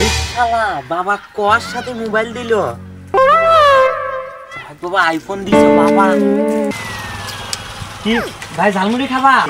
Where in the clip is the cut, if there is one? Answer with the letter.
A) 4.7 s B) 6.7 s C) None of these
B